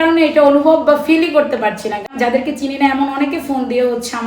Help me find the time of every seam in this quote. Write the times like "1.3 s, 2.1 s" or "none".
2.1 s